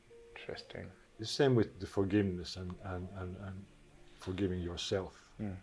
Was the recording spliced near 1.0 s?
yes; 1 cut; at 1.0 s

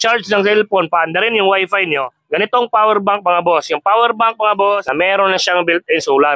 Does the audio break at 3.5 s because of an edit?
no; 2 cuts; at 2.1 s, 4.9 s

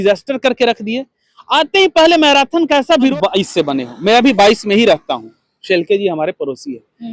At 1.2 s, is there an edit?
no; 1 cut; at 3.1 s

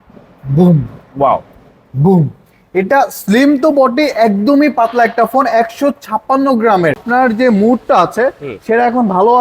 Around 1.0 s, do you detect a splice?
no; 1 cut; at 7.0 s

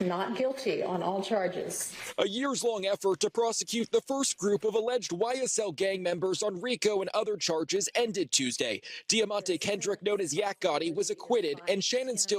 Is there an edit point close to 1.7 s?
no; 0 cuts

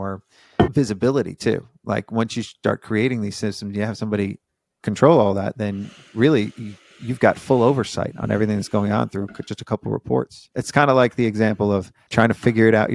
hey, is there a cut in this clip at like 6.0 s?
no; 1 cut; at 10.5 s

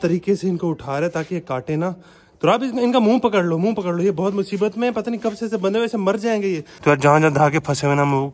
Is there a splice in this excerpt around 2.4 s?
no; 1 cut; at 6.7 s

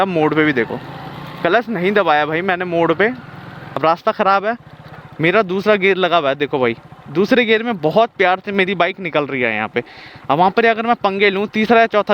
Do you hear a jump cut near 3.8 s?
yes; 1 cut; at 3.8 s

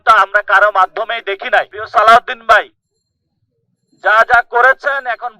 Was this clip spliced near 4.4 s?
no; 1 cut; at 1.8 s

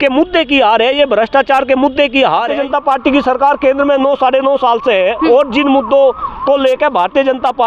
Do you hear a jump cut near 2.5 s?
yes; 1 cut; at 2.5 s

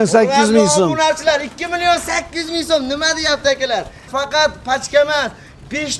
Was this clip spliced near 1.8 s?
no; 1 cut; at 4.0 s

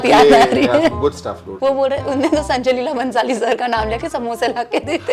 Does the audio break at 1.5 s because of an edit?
yes; 1 cut; at 1.5 s

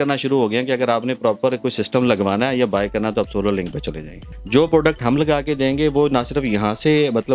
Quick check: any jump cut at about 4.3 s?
yes; 1 cut; at 4.3 s

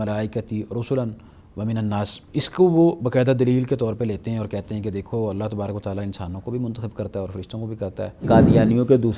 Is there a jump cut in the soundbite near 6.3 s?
no; 2 cuts; at 2.2 s, 8.3 s

